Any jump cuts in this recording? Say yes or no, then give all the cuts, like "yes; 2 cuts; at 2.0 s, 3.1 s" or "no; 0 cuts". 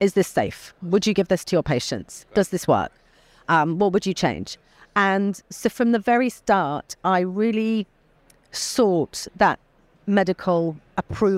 no; 0 cuts